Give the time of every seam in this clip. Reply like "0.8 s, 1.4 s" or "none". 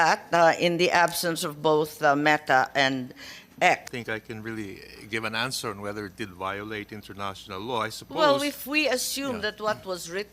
3.9 s